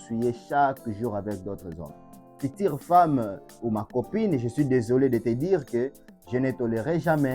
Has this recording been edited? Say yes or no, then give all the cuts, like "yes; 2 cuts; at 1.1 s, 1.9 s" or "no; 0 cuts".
yes; 1 cut; at 2.4 s